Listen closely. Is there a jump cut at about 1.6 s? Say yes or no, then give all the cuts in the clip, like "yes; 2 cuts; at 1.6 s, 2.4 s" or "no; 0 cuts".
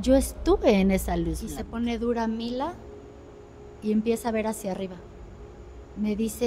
yes; 1 cut; at 1.6 s